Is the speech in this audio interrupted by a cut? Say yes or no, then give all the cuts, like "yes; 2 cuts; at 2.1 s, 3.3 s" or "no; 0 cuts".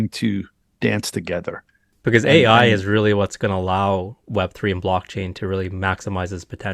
yes; 1 cut; at 1.9 s